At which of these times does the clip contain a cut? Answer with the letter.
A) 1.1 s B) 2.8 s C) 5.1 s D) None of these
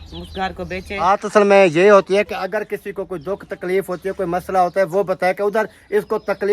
A